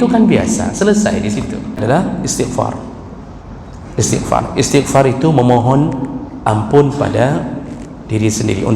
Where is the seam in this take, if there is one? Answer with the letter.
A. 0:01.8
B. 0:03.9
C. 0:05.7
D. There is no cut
A